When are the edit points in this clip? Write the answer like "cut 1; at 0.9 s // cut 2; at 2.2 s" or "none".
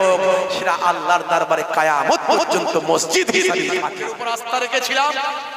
cut 1; at 4.0 s